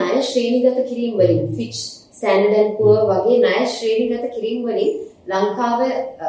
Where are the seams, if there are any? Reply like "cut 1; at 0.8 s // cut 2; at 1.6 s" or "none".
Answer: none